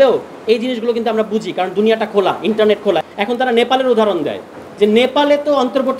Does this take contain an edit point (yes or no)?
yes